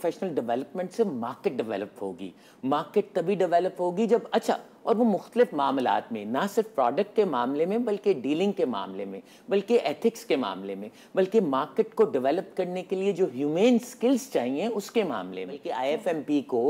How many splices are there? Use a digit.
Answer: 1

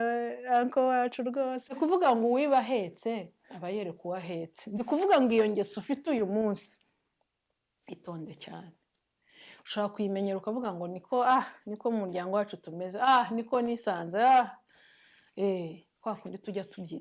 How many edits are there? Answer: 1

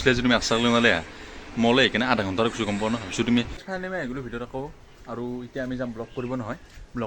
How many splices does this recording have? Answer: 1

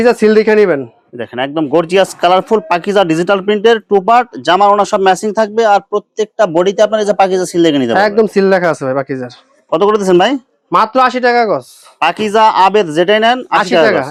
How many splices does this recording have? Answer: 0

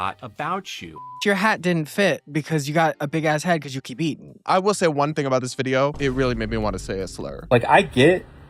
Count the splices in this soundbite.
5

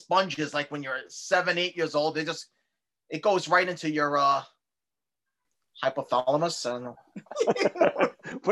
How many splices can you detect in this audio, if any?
0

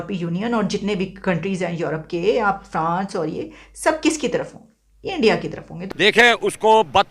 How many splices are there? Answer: 1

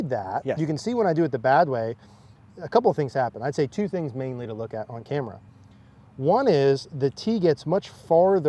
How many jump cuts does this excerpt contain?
0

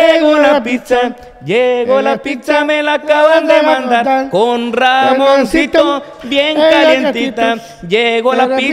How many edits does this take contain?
0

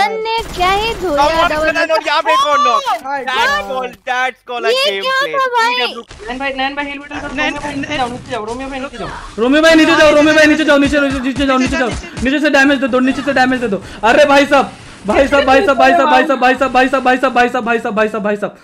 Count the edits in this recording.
1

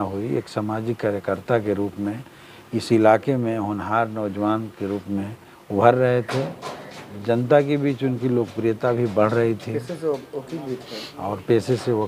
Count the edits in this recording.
0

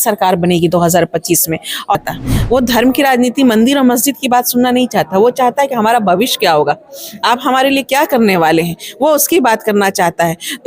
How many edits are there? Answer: 1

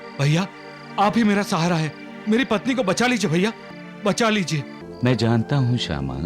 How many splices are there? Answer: 1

